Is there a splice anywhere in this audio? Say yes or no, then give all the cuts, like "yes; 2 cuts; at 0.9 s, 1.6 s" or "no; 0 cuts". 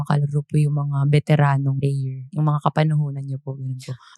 yes; 1 cut; at 2.3 s